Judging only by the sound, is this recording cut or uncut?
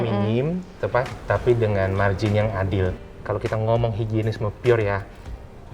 cut